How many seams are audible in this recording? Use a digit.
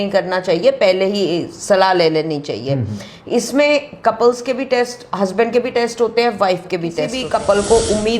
1